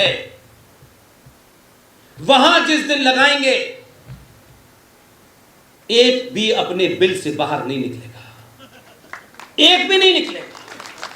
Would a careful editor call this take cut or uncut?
uncut